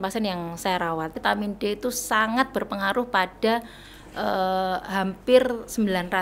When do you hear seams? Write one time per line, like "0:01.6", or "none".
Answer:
0:01.2